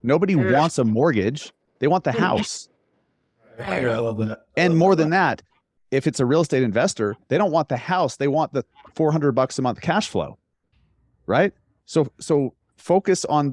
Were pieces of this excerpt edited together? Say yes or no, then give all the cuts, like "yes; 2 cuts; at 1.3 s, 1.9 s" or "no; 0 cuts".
no; 0 cuts